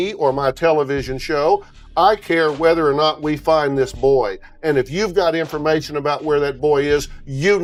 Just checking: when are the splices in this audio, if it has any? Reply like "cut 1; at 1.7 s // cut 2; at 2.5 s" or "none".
none